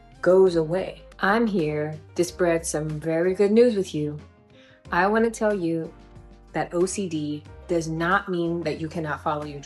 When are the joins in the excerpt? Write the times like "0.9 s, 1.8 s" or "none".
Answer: 1.0 s